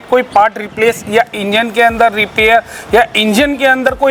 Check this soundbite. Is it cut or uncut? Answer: uncut